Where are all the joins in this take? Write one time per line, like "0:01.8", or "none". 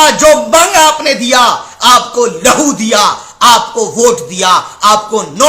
none